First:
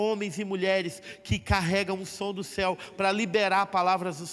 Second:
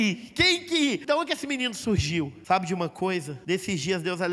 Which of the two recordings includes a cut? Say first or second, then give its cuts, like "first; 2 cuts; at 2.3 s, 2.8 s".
second; 3 cuts; at 1.0 s, 2.4 s, 3.3 s